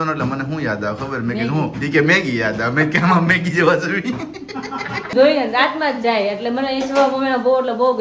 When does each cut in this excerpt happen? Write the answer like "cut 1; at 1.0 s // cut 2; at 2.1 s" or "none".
cut 1; at 5.1 s